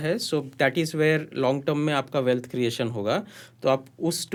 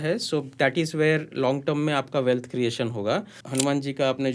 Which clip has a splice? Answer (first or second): second